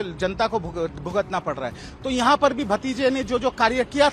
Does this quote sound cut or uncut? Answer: uncut